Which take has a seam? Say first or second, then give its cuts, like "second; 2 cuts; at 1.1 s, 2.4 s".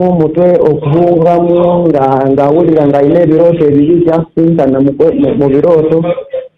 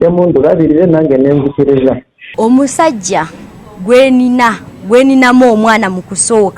second; 1 cut; at 2.3 s